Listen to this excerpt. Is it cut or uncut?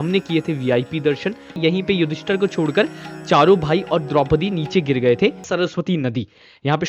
cut